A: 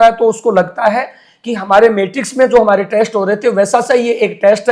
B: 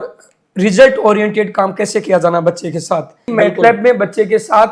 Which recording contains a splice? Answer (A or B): B